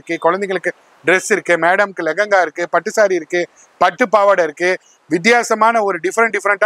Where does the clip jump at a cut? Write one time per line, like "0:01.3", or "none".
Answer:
none